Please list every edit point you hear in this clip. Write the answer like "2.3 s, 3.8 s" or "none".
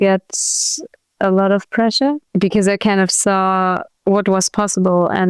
2.3 s, 3.9 s